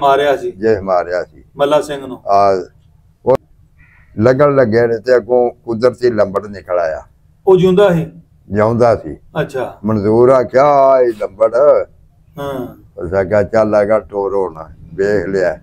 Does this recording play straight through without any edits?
no; 1 cut; at 3.4 s

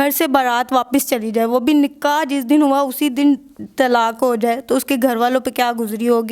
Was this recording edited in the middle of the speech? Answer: no; 0 cuts

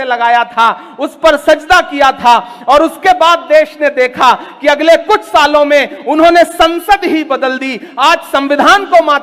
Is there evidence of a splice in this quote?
no; 0 cuts

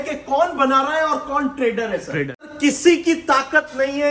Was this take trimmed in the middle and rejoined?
yes; 1 cut; at 2.5 s

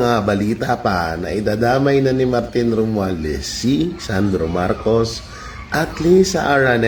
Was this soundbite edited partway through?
no; 0 cuts

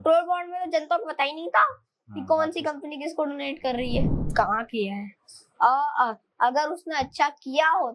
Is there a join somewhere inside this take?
yes; 1 cut; at 4.2 s

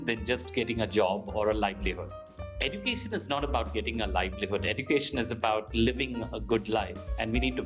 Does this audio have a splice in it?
no; 0 cuts

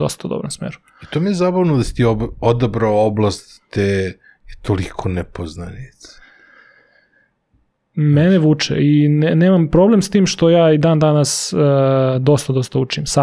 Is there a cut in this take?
no; 0 cuts

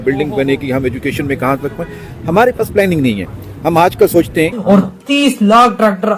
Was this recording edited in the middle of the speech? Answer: yes; 1 cut; at 4.6 s

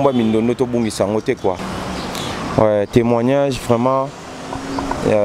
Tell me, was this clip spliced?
yes; 1 cut; at 1.7 s

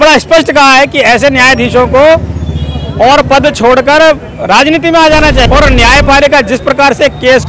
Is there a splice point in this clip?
yes; 1 cut; at 5.5 s

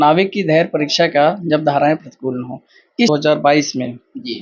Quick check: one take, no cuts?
no; 1 cut; at 3.1 s

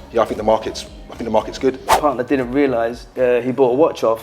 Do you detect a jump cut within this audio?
yes; 2 cuts; at 1.9 s, 3.1 s

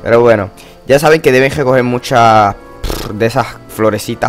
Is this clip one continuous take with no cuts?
no; 1 cut; at 2.1 s

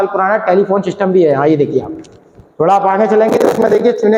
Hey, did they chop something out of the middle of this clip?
no; 0 cuts

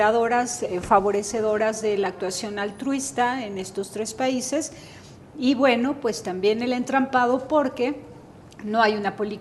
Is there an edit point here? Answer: yes; 1 cut; at 2.4 s

